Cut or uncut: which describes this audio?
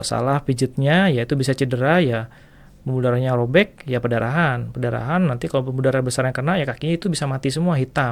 uncut